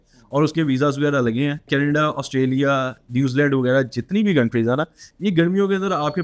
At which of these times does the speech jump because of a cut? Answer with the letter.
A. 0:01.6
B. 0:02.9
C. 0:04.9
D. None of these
A